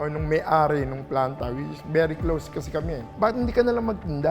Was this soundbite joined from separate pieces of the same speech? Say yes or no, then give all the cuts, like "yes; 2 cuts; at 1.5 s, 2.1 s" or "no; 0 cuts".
yes; 1 cut; at 3.1 s